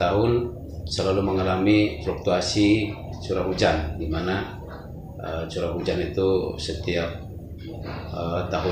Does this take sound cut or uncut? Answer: uncut